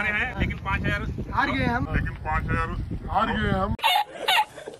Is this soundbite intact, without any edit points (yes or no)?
yes